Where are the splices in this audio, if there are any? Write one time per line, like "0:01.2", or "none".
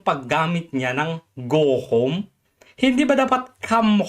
none